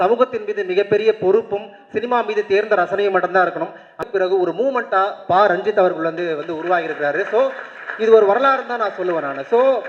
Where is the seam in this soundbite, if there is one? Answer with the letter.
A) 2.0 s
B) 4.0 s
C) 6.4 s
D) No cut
B